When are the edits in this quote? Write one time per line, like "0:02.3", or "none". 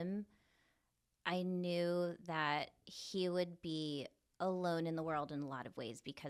none